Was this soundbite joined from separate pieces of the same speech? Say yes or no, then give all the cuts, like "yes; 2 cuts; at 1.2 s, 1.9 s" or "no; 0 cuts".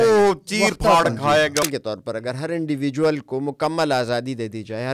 yes; 1 cut; at 1.6 s